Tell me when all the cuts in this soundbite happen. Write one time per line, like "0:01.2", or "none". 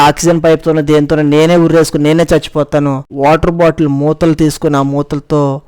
0:03.1